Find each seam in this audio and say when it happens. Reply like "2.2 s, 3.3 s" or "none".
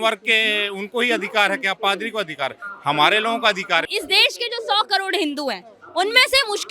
3.9 s